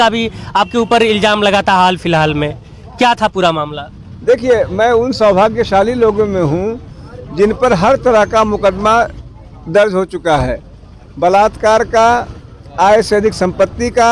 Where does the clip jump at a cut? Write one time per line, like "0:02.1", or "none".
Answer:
none